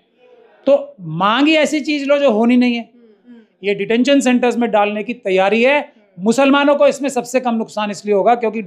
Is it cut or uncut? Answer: cut